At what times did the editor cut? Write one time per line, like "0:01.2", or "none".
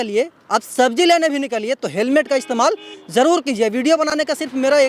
none